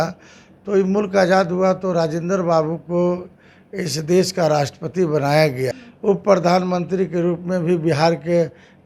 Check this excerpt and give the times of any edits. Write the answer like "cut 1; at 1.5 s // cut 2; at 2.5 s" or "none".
cut 1; at 5.9 s

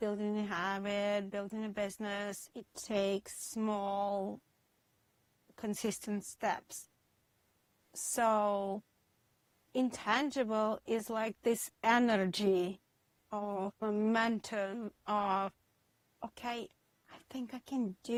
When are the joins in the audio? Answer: none

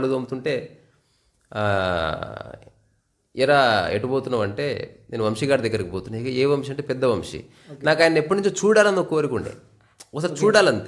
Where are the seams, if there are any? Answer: none

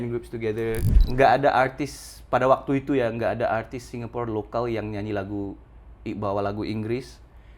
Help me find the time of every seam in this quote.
cut 1; at 1.0 s

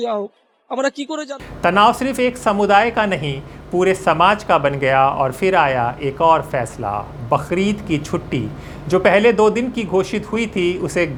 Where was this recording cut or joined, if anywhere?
none

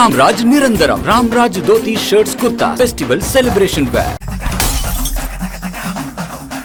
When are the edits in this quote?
none

